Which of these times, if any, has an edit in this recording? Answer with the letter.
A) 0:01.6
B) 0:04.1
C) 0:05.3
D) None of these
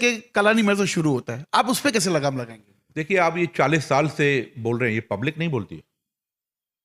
D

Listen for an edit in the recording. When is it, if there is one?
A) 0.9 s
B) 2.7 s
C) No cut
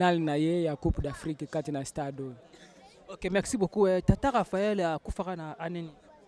C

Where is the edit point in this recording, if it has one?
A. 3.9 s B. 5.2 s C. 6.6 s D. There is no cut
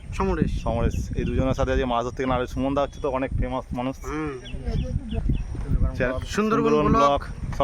B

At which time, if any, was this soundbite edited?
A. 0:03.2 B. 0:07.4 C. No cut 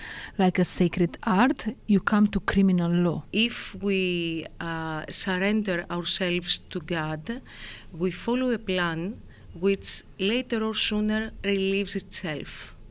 A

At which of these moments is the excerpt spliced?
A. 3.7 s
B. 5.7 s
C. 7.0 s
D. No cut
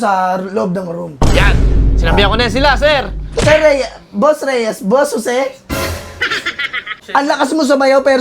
C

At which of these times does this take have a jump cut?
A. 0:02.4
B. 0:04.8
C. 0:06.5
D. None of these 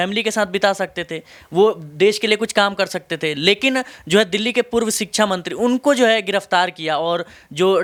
D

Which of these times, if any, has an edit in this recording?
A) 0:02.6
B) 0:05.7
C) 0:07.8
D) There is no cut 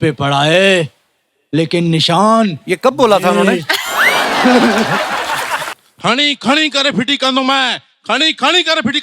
B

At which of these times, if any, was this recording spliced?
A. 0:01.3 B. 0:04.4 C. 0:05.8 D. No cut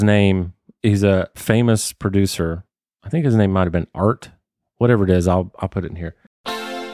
A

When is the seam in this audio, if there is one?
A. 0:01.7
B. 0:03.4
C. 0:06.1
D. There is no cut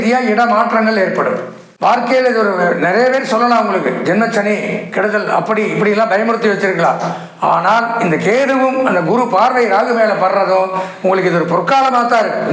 A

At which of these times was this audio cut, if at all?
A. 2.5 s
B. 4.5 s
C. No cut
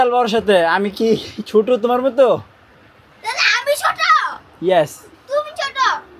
C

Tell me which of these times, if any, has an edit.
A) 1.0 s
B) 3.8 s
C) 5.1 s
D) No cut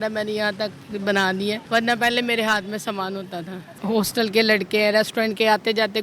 B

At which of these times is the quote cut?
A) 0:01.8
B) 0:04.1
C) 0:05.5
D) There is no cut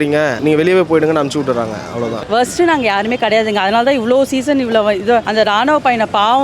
D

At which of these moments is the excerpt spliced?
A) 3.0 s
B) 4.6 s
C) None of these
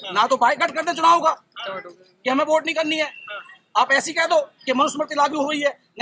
C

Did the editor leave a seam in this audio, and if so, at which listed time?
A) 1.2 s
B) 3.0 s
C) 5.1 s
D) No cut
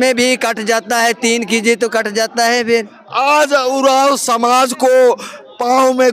B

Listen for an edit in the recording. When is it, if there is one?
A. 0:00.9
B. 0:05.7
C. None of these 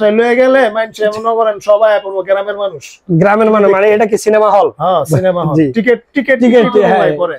C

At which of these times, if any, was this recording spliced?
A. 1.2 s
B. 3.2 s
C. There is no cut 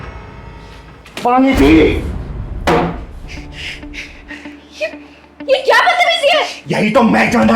A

